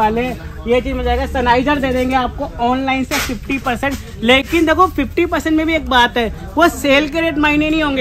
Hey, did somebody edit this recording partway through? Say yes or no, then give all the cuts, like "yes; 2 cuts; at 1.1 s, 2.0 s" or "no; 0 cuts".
no; 0 cuts